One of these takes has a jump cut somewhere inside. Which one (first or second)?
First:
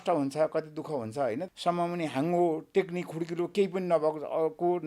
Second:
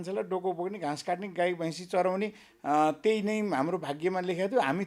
first